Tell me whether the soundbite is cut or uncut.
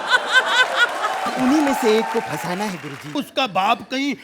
cut